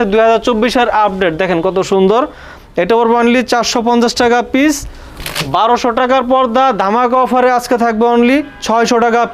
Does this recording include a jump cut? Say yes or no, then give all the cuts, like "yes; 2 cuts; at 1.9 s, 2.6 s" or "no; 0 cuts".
no; 0 cuts